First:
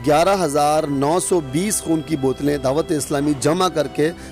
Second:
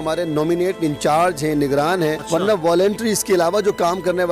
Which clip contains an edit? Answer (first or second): second